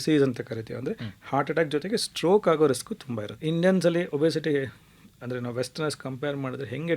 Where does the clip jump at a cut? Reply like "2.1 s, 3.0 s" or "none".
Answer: 3.3 s